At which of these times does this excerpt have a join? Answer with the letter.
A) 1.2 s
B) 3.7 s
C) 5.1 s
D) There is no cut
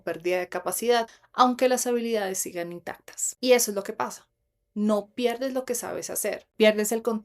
A